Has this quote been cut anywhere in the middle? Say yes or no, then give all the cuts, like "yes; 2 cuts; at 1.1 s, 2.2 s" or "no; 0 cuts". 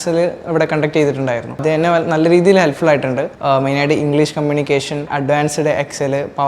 yes; 2 cuts; at 1.6 s, 3.3 s